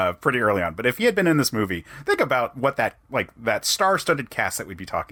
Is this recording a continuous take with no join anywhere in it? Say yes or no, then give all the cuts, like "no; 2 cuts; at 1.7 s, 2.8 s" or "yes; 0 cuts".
yes; 0 cuts